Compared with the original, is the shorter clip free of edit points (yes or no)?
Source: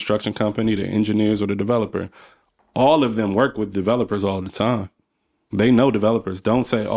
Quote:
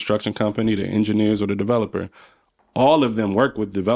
yes